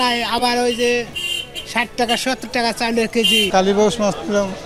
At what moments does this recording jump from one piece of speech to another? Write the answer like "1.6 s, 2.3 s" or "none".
3.5 s